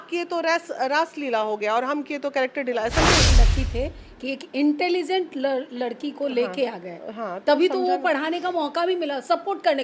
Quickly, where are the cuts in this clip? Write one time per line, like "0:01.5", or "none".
0:03.4